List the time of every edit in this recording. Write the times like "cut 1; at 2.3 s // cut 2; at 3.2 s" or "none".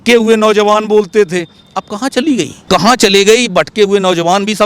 cut 1; at 2.6 s